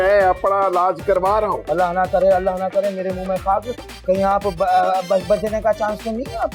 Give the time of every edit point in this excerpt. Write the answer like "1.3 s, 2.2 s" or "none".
none